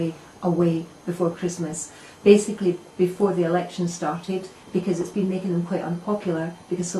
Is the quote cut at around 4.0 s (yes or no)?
no